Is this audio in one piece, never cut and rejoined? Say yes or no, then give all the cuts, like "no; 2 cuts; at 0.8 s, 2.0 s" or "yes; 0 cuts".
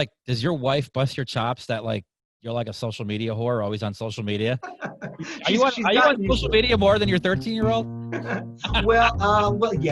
yes; 0 cuts